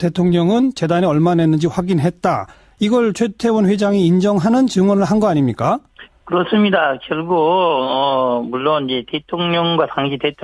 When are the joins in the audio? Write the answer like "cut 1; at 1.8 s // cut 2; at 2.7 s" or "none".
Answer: cut 1; at 1.9 s